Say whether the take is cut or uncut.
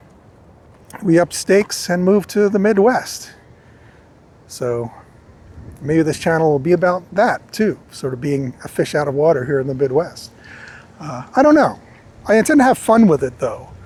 uncut